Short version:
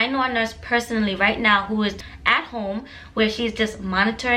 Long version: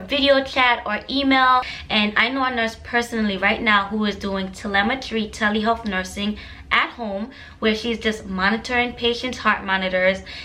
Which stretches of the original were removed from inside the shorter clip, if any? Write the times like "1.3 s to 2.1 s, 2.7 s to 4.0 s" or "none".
4.2 s to 6.4 s